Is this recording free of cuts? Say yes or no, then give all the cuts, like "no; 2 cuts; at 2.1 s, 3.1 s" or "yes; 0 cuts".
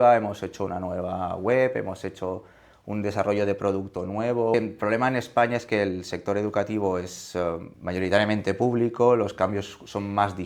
no; 2 cuts; at 4.5 s, 7.7 s